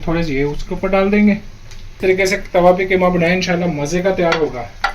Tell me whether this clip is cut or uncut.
cut